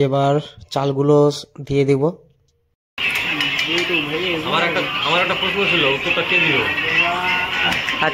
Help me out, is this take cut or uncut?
cut